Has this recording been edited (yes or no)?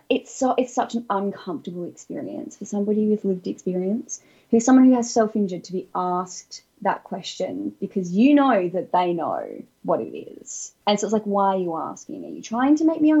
no